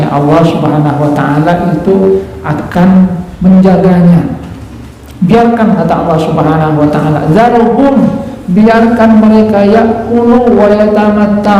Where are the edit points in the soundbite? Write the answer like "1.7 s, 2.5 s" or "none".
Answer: none